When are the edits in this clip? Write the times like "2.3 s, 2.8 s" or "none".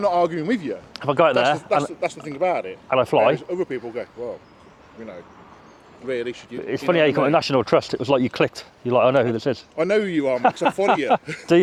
none